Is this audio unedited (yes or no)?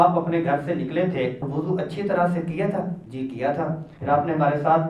no